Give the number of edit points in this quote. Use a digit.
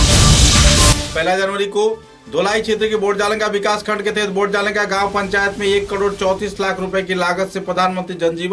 1